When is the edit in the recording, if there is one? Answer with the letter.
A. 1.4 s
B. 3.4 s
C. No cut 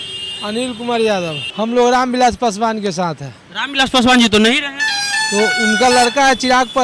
A